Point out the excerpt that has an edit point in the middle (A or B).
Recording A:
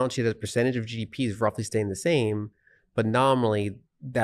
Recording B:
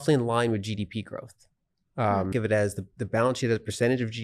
B